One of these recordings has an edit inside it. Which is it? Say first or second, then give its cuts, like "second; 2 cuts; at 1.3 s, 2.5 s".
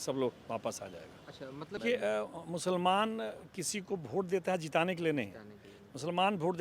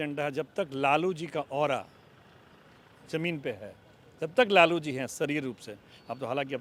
first; 1 cut; at 1.7 s